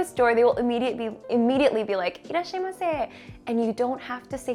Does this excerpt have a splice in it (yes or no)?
no